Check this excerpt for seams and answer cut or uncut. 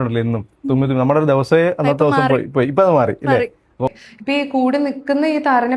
cut